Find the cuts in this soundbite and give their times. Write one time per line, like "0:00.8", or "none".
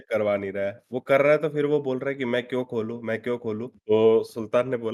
0:03.6

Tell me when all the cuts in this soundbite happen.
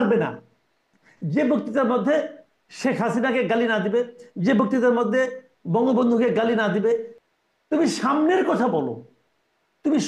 0:07.1

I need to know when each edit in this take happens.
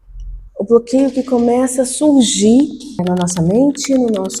0:03.0

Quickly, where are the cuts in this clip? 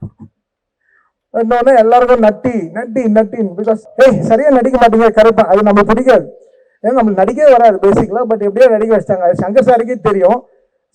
0:03.9

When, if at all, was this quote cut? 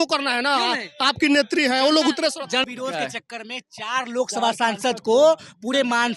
0:02.6

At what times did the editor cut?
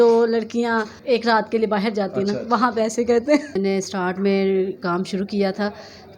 0:00.9
0:03.5

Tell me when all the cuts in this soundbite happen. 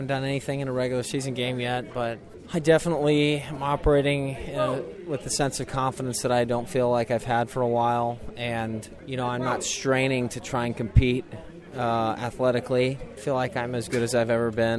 0:02.3
0:08.9
0:13.1

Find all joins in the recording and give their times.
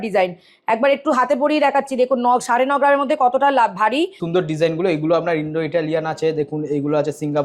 0:04.2

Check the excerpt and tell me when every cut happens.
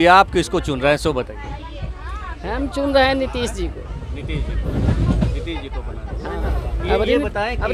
none

